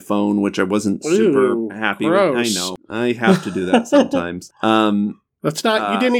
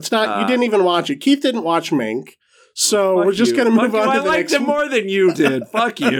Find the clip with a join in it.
first; 2 cuts; at 2.7 s, 4.4 s

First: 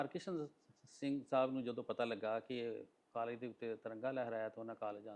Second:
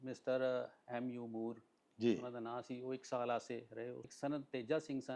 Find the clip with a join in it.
second; 1 cut; at 4.0 s

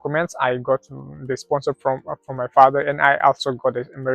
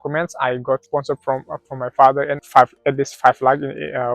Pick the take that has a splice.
second; 2 cuts; at 0.8 s, 2.4 s

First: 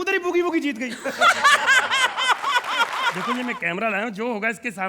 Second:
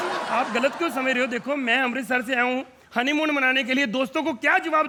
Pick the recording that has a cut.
first; 1 cut; at 3.2 s

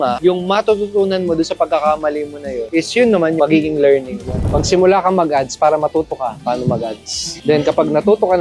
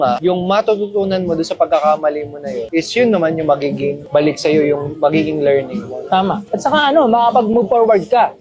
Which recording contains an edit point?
first; 3 cuts; at 3.4 s, 4.4 s, 7.2 s

